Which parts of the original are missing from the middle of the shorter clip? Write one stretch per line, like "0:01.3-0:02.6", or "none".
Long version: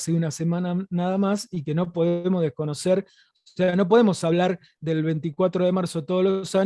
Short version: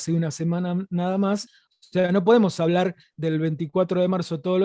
0:01.5-0:03.2